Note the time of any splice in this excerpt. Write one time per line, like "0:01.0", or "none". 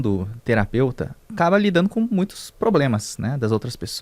0:01.2

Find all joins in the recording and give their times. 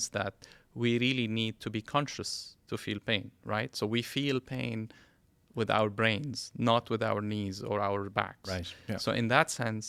none

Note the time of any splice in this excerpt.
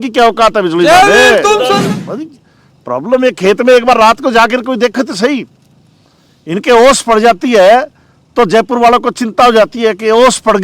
0:01.8

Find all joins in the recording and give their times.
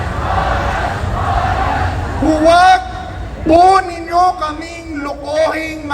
0:02.1

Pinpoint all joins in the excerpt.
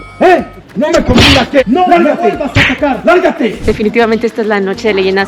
0:03.6

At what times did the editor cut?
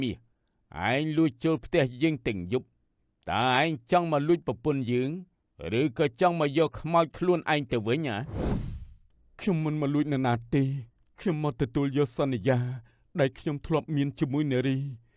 none

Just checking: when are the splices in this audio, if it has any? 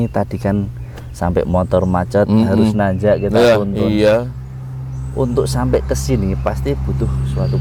none

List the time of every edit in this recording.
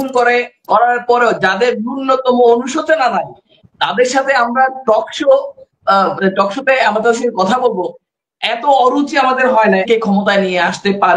0:09.8

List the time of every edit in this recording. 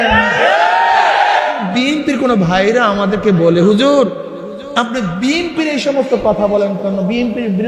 0:01.6

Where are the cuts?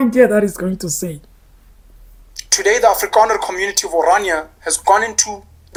none

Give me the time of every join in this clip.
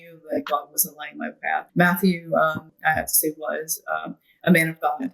0:01.7
0:02.7

